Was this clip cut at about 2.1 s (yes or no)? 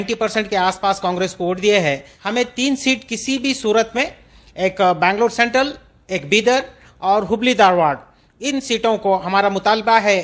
yes